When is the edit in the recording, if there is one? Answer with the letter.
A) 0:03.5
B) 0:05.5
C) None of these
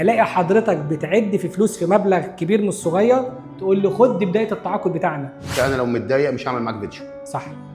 B